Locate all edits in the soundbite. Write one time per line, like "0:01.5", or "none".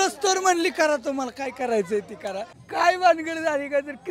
0:02.6